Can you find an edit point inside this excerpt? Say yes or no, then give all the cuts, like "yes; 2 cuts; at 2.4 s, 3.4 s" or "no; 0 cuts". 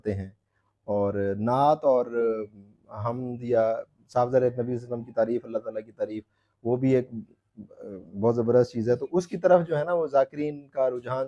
no; 0 cuts